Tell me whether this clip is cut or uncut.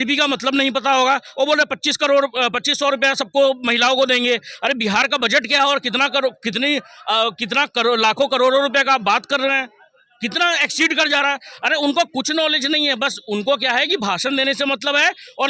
uncut